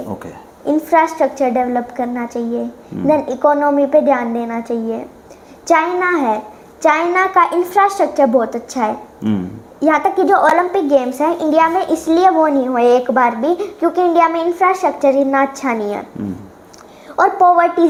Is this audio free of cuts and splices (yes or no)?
yes